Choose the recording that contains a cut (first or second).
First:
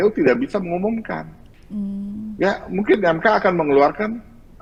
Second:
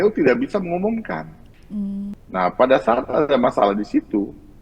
second